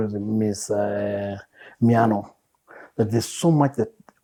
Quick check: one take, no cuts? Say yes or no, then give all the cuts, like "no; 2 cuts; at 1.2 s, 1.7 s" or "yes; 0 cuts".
yes; 0 cuts